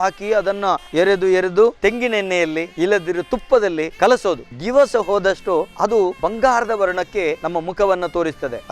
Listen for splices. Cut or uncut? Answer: cut